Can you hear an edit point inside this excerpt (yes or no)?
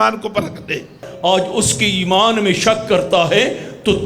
yes